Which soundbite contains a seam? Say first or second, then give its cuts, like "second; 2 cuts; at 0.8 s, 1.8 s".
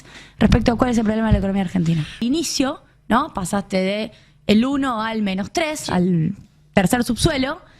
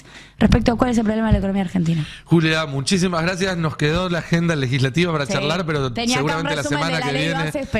first; 1 cut; at 2.2 s